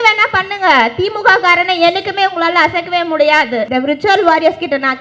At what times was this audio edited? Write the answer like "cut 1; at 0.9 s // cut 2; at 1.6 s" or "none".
cut 1; at 3.7 s